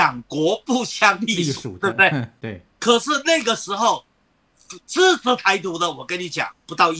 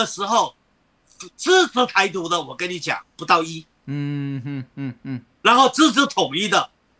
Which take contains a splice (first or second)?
first